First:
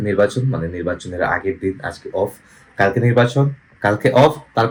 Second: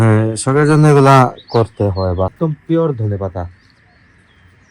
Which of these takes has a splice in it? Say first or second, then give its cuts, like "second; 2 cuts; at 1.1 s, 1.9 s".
second; 1 cut; at 2.3 s